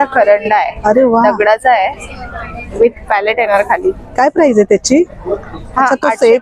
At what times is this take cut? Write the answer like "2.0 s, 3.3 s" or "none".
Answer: none